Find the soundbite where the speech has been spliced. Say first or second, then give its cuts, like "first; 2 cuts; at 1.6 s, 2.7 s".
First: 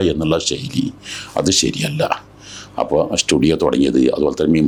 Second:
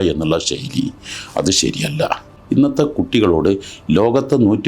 second; 1 cut; at 2.3 s